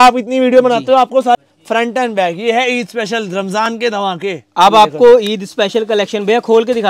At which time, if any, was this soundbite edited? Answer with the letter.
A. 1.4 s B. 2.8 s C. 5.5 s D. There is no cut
A